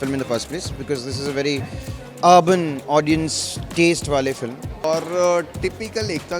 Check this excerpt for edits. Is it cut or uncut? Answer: cut